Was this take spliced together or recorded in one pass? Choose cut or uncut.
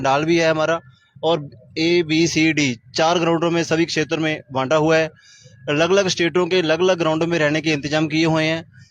uncut